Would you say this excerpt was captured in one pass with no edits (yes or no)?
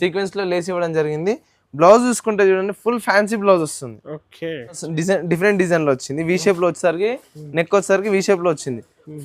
no